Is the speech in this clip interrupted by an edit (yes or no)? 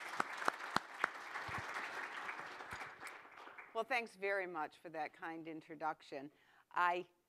no